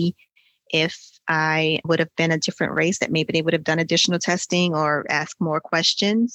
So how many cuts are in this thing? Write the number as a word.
one